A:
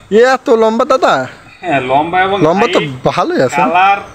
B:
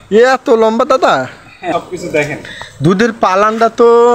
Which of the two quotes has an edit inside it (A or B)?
B